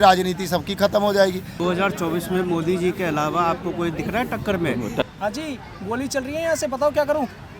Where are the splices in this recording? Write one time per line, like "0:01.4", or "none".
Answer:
0:01.5
0:05.1